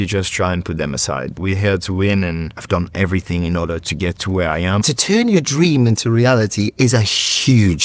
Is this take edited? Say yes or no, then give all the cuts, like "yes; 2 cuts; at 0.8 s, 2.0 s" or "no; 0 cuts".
yes; 3 cuts; at 1.4 s, 2.7 s, 4.8 s